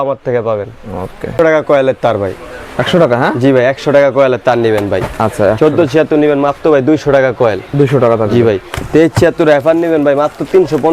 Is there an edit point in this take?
no; 0 cuts

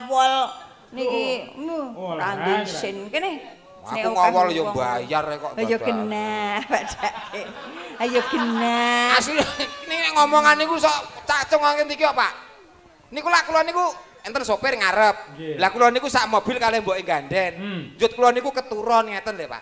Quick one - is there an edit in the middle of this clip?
no; 0 cuts

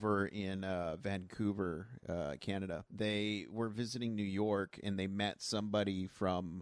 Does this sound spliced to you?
yes; 1 cut; at 2.8 s

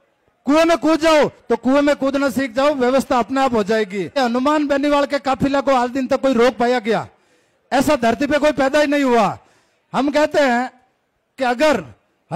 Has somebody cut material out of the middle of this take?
yes; 1 cut; at 4.0 s

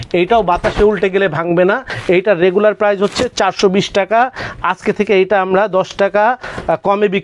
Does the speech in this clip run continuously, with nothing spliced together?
no; 1 cut; at 1.9 s

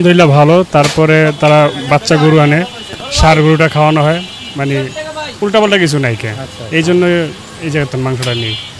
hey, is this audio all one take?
yes; 0 cuts

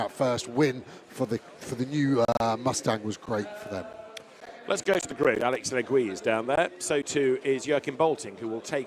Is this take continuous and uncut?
no; 1 cut; at 2.9 s

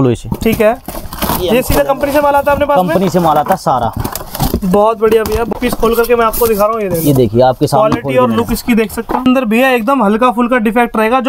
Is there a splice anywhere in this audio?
yes; 2 cuts; at 5.5 s, 9.2 s

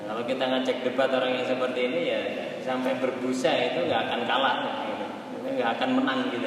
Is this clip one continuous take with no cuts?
yes; 0 cuts

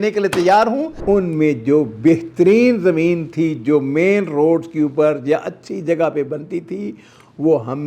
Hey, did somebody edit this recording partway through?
yes; 1 cut; at 0.9 s

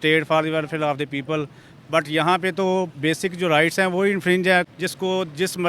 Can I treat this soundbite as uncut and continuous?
no; 1 cut; at 4.7 s

